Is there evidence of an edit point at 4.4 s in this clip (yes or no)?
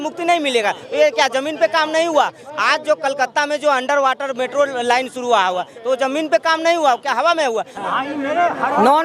no